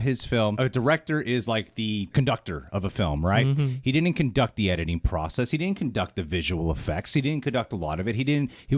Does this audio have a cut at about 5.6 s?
no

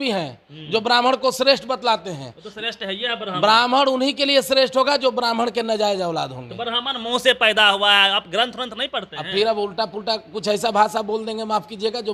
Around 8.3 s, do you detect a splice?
no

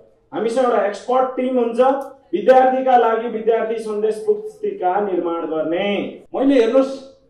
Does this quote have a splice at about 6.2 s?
yes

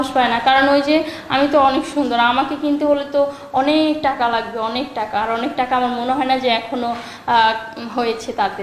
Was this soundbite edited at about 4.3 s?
no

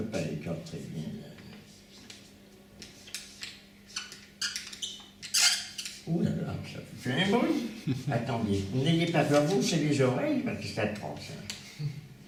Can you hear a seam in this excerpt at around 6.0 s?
no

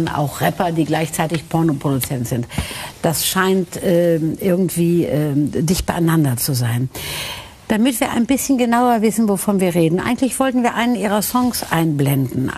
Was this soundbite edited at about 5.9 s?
yes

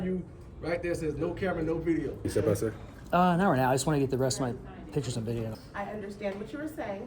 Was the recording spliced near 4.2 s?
no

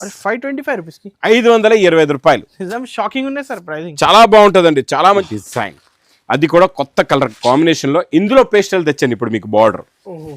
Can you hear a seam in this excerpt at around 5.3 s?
yes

